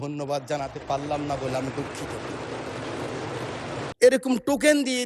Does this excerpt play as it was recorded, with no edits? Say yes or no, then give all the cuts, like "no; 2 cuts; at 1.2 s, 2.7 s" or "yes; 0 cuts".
no; 1 cut; at 3.9 s